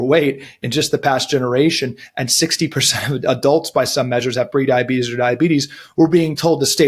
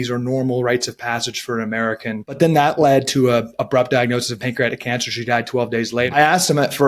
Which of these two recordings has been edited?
second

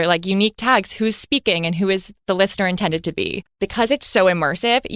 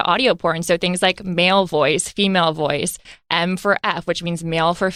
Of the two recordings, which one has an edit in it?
first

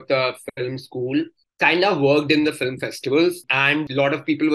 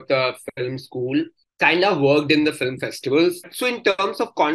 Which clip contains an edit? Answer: second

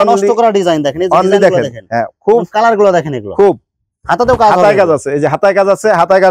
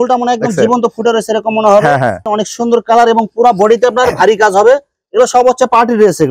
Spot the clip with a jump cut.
second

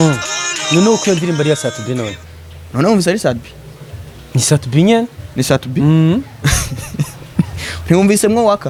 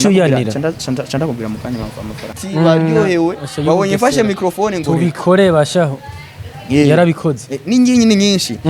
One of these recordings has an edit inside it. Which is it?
second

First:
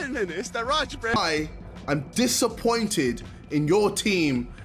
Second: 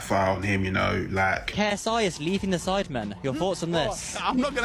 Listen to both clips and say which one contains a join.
first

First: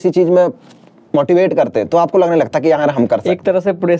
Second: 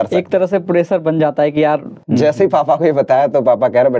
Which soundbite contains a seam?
second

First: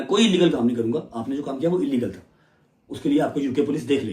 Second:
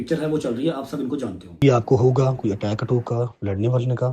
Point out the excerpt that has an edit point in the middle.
second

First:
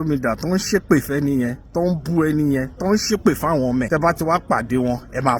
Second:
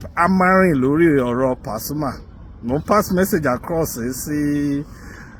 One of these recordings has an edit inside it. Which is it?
first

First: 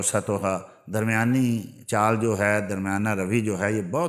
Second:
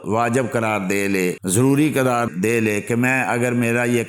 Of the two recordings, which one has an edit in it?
second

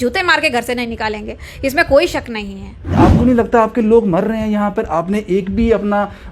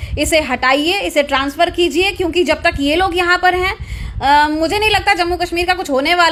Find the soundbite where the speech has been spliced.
first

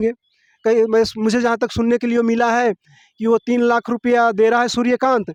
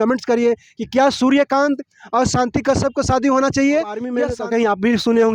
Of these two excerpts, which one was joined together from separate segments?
second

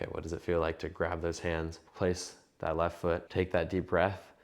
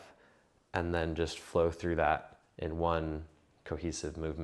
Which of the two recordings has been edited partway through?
first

